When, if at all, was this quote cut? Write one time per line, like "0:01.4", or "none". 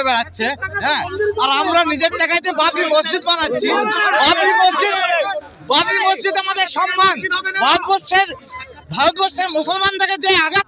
none